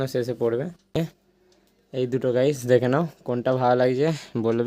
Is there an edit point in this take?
yes; 1 cut; at 1.0 s

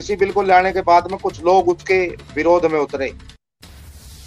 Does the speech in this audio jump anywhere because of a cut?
yes; 1 cut; at 3.1 s

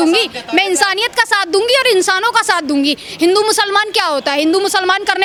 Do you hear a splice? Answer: no; 0 cuts

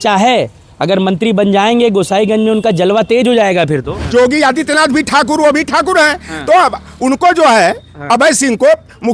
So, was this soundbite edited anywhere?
yes; 1 cut; at 4.0 s

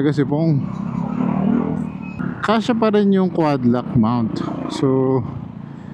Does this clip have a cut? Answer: yes; 1 cut; at 2.2 s

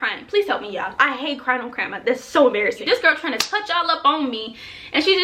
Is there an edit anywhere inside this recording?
yes; 2 cuts; at 0.9 s, 2.8 s

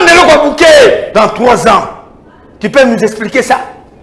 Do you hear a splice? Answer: yes; 1 cut; at 1.1 s

